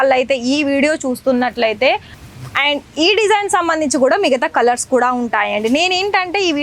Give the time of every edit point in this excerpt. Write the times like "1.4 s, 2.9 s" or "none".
2.2 s